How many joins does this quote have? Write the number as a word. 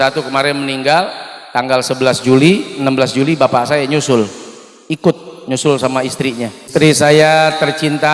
one